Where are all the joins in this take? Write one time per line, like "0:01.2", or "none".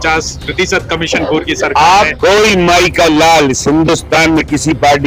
0:02.1